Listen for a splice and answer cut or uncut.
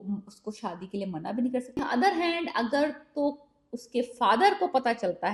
cut